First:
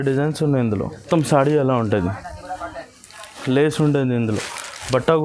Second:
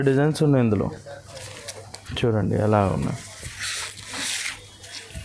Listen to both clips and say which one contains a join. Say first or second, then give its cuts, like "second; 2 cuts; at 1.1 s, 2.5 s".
first; 1 cut; at 1.0 s